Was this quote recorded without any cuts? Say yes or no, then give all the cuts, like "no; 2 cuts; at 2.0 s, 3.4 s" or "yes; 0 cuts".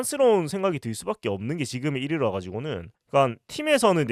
yes; 0 cuts